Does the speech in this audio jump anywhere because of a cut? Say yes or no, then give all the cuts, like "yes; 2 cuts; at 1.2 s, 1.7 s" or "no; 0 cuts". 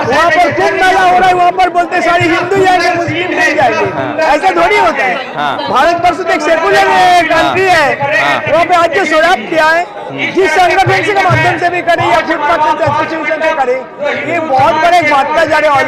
no; 0 cuts